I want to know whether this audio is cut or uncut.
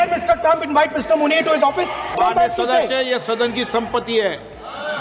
cut